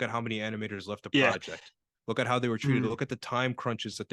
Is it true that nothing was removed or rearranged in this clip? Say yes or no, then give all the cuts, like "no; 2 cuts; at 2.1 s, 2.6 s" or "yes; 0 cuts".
yes; 0 cuts